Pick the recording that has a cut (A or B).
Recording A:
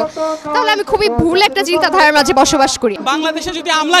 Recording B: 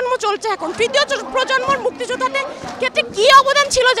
A